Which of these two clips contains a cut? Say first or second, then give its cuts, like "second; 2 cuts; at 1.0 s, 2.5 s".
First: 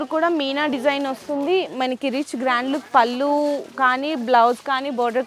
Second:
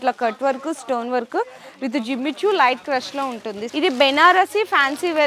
second; 1 cut; at 3.6 s